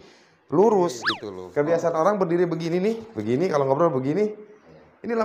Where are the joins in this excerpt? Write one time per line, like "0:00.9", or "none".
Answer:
0:01.1